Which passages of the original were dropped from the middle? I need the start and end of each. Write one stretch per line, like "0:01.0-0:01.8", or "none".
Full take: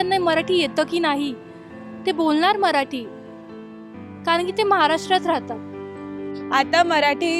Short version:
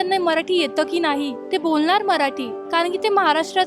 0:01.4-0:01.9
0:03.1-0:04.1